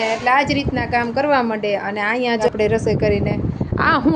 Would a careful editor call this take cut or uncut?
cut